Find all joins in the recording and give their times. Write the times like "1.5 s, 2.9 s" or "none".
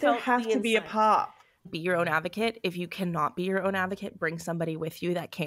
1.7 s